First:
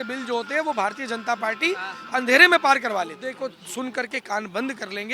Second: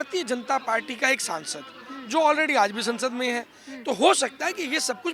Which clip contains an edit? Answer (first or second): first